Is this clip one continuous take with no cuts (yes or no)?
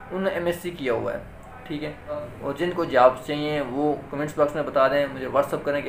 no